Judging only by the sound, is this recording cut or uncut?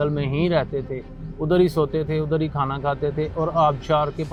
uncut